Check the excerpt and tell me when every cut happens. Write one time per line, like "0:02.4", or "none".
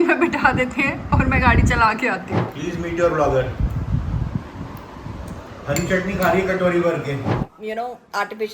0:02.5
0:07.2